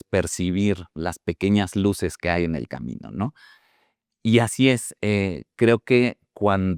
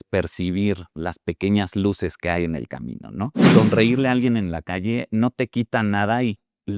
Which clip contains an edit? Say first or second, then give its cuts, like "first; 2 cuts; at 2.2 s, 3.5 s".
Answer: second; 1 cut; at 3.4 s